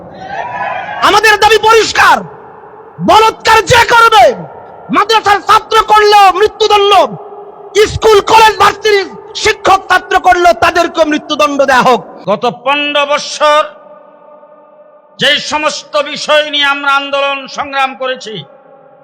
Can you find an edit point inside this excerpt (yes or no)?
yes